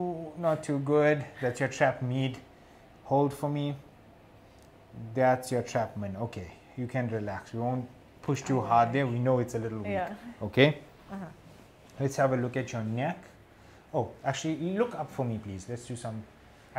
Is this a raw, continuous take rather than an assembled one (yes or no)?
yes